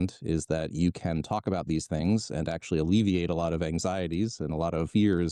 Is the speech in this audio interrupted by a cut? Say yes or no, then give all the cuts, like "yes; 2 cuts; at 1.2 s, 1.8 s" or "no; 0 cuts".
no; 0 cuts